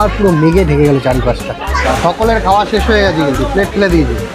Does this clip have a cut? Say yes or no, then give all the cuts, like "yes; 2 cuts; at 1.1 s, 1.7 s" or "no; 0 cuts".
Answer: yes; 1 cut; at 1.8 s